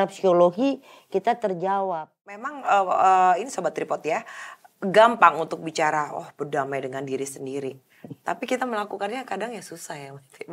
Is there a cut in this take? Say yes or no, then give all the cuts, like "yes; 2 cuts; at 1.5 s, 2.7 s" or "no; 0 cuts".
yes; 1 cut; at 2.4 s